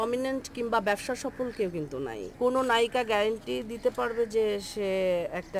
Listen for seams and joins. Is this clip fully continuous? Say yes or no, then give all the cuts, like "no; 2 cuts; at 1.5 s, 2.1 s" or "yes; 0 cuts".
no; 1 cut; at 2.2 s